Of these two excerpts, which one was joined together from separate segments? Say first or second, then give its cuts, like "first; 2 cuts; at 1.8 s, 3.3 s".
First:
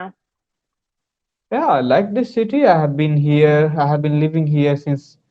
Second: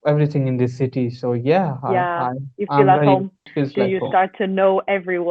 second; 1 cut; at 3.4 s